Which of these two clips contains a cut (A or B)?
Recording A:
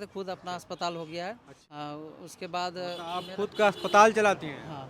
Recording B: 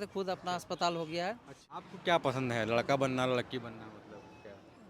B